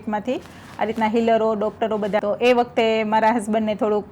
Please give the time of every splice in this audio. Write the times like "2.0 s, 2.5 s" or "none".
2.2 s